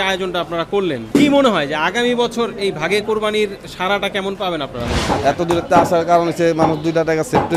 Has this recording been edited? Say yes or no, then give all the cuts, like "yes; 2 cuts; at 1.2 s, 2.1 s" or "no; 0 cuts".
yes; 2 cuts; at 1.0 s, 5.0 s